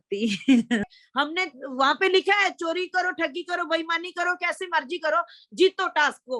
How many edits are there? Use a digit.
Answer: 1